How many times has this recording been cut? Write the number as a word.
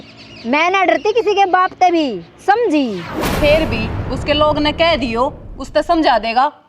one